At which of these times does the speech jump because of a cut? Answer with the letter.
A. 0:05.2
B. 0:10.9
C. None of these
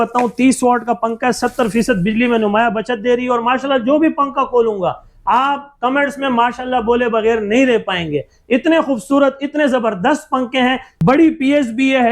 B